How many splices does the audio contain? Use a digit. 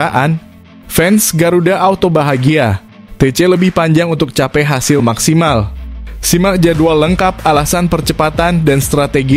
0